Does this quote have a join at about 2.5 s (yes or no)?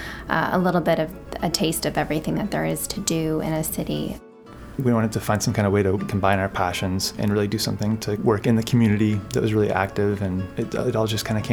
no